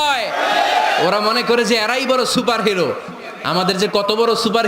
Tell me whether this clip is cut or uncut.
uncut